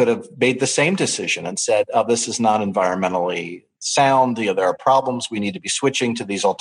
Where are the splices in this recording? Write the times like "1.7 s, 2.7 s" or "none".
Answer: none